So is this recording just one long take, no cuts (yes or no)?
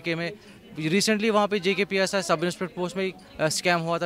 yes